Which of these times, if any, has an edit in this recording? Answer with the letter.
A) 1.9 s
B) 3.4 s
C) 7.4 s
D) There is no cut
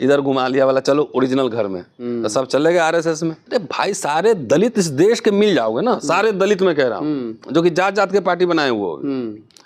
B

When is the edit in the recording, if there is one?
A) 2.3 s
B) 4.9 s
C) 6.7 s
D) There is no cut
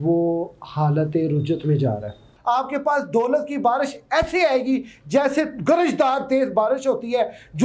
A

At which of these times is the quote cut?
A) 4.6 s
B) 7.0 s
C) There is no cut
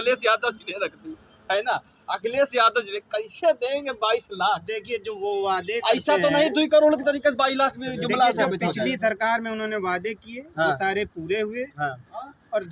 C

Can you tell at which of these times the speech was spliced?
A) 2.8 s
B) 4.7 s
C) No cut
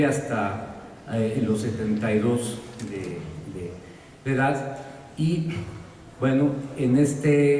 A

